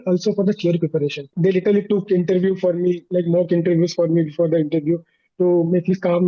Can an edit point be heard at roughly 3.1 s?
no; 1 cut; at 1.3 s

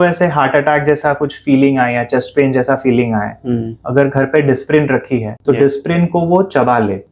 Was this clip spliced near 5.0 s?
no; 0 cuts

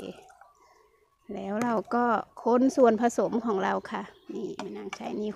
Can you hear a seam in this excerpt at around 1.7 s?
no; 0 cuts

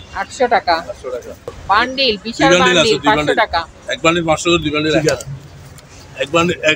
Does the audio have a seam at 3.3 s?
no; 2 cuts; at 1.6 s, 5.0 s

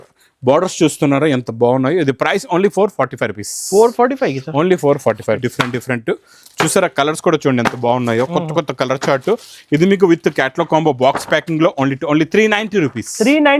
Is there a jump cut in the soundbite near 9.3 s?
no; 1 cut; at 5.5 s

